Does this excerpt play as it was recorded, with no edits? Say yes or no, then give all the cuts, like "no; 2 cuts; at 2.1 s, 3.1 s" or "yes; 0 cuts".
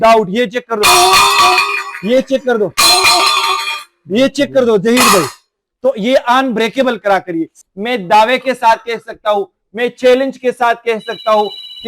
no; 1 cut; at 7.6 s